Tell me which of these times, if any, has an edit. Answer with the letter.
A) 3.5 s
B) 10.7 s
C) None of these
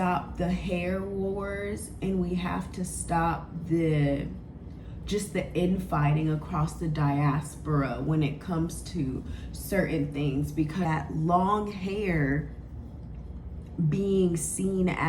B